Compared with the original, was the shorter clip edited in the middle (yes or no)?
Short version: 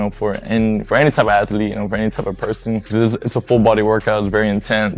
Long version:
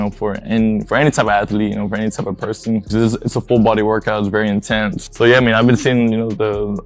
no